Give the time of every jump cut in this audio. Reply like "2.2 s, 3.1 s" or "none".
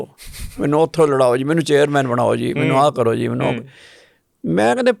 none

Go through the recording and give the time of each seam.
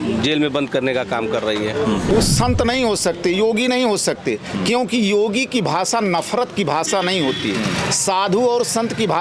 2.1 s

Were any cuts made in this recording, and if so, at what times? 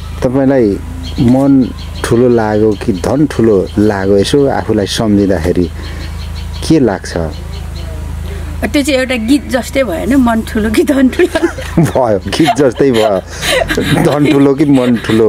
none

